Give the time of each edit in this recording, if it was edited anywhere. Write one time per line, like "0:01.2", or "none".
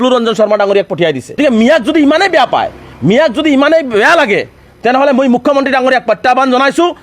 0:01.4